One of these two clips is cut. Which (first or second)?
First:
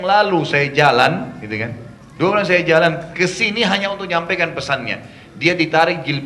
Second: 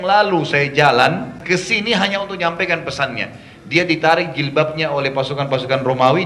second